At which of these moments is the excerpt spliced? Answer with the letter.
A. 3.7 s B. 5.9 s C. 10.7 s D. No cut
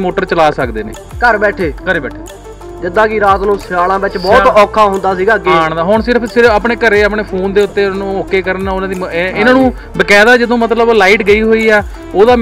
D